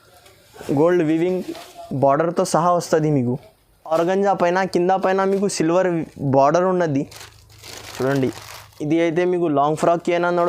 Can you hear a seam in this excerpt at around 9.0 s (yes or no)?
no